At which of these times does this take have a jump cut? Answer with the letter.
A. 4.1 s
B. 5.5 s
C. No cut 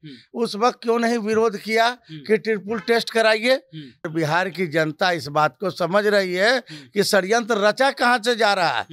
A